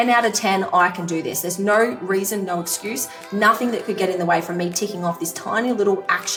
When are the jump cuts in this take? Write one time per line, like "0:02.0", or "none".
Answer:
none